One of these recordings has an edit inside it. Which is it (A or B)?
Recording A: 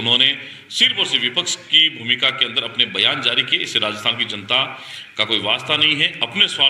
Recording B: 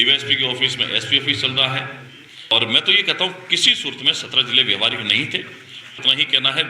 B